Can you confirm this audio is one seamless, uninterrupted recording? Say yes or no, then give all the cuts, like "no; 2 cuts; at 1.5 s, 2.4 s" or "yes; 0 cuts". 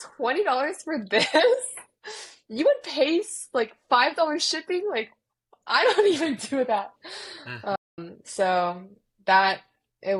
yes; 0 cuts